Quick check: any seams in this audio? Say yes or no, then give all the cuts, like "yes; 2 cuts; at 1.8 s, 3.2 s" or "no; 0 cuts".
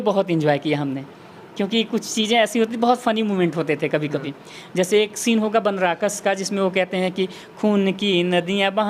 no; 0 cuts